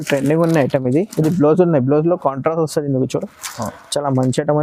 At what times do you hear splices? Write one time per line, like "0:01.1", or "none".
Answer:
none

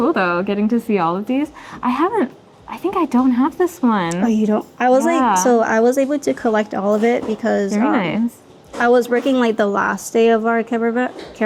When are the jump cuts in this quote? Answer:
none

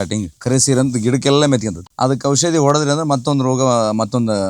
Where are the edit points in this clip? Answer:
0:01.8

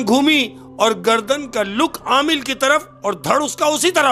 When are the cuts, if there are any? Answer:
none

